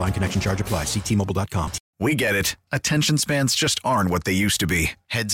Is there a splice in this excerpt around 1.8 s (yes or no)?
yes